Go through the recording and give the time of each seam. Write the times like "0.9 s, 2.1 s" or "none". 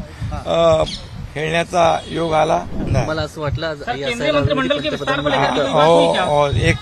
2.8 s